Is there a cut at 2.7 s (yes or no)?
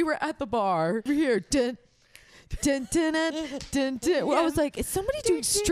no